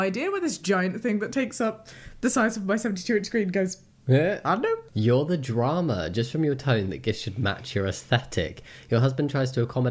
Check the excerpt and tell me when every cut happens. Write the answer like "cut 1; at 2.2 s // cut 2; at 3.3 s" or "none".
none